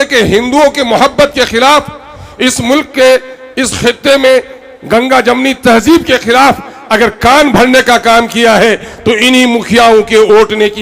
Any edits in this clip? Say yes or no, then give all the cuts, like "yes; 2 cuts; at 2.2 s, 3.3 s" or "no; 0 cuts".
no; 0 cuts